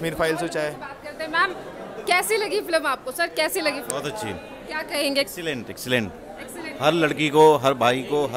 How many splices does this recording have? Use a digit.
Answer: 0